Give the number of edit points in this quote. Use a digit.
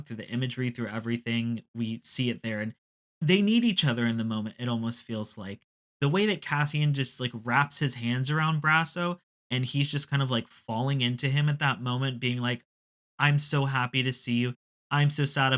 2